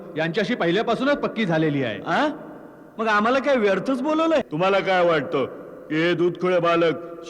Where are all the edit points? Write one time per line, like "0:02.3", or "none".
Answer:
0:04.5